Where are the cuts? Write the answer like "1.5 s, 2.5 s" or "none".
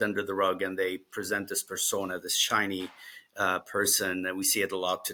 none

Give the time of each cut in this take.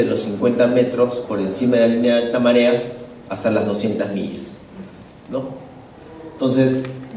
none

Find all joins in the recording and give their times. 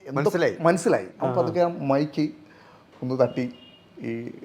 1.1 s

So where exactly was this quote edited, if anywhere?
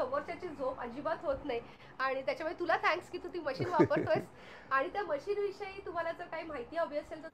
none

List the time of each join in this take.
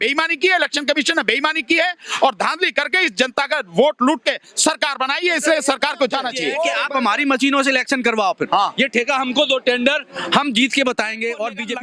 6.7 s

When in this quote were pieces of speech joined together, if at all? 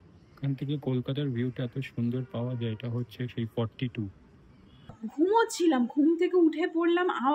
5.0 s

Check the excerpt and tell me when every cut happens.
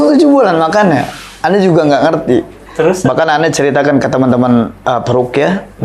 none

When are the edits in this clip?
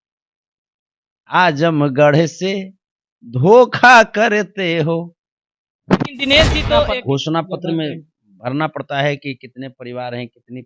6.9 s

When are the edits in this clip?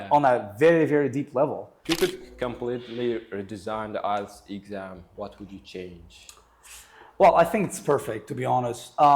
1.7 s

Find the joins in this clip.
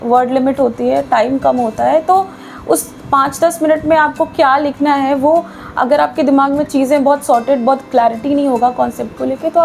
none

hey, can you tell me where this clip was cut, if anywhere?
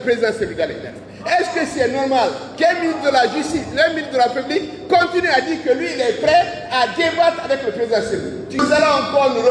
8.6 s

